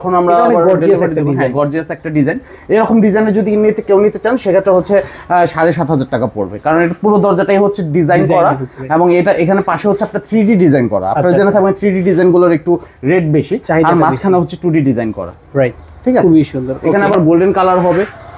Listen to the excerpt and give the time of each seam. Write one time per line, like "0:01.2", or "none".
none